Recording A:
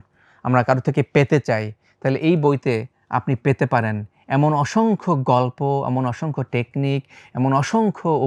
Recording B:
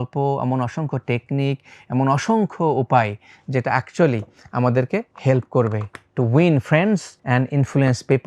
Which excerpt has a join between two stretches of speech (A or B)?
B